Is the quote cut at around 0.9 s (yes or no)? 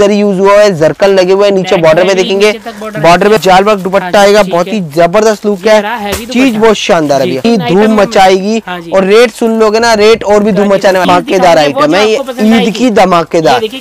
no